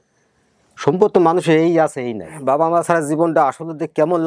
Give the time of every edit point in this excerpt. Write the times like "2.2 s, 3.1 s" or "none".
2.3 s